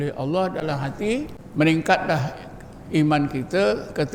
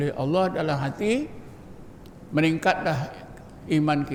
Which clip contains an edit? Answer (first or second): first